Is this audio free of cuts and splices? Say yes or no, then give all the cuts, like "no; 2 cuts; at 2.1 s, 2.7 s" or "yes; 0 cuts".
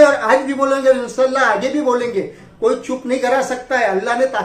yes; 0 cuts